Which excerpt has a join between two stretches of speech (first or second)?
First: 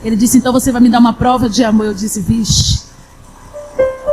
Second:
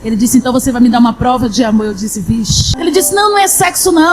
second